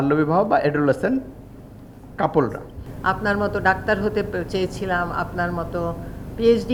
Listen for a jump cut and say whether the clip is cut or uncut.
uncut